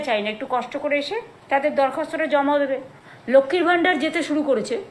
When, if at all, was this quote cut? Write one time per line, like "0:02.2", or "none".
0:02.9